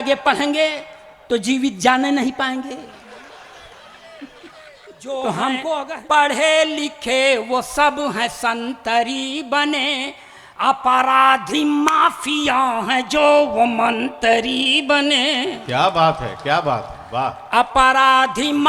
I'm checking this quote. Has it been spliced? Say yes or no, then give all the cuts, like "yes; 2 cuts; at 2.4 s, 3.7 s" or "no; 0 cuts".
yes; 1 cut; at 5.8 s